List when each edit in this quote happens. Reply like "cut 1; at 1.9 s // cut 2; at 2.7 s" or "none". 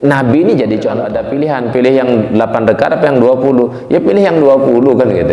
cut 1; at 1.1 s